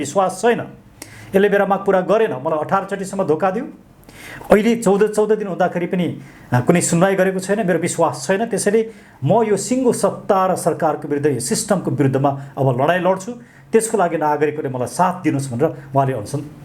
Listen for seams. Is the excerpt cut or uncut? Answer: uncut